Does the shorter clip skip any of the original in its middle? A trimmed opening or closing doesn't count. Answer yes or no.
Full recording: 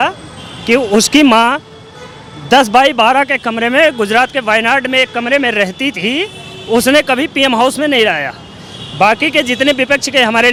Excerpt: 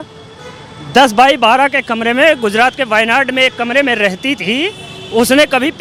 no